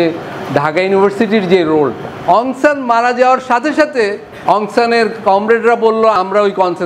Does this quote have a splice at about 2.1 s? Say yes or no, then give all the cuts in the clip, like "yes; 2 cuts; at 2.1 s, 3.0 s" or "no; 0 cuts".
yes; 3 cuts; at 2.1 s, 4.3 s, 6.2 s